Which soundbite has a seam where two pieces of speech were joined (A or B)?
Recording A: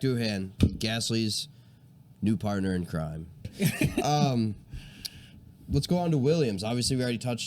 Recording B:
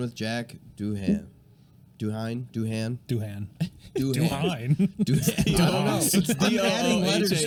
A